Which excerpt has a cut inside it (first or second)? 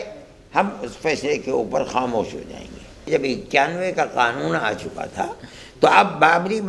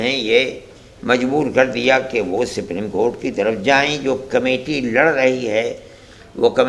first